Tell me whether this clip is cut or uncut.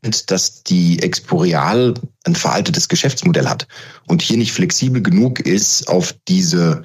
uncut